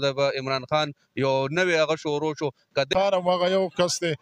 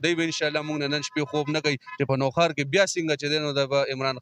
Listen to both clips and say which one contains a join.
first; 1 cut; at 2.9 s

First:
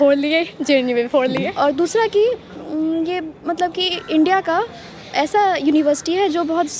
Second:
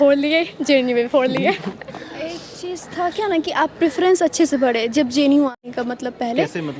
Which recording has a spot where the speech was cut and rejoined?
first; 1 cut; at 1.5 s

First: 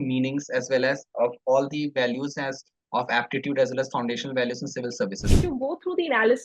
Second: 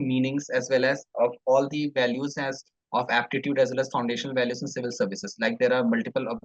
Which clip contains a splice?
first; 1 cut; at 5.3 s

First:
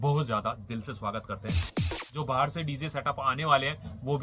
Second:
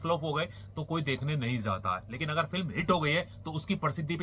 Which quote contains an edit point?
first; 1 cut; at 1.8 s

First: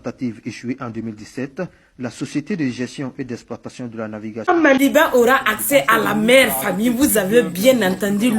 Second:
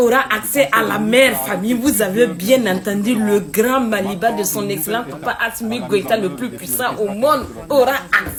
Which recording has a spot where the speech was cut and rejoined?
first; 1 cut; at 4.2 s

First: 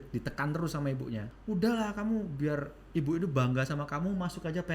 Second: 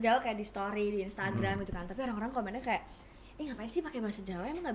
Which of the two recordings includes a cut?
first; 1 cut; at 1.3 s

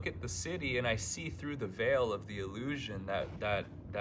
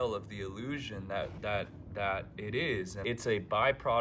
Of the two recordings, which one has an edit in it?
second; 1 cut; at 3.0 s

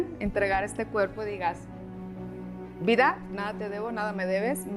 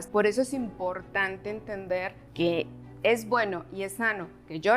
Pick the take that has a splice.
second; 1 cut; at 2.2 s

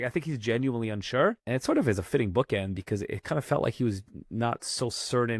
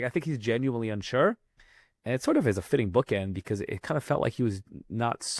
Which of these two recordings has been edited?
first; 1 cut; at 1.4 s

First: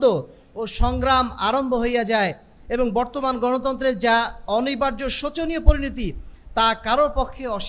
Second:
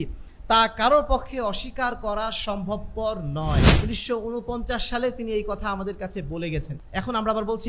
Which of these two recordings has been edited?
second; 2 cuts; at 3.7 s, 6.8 s

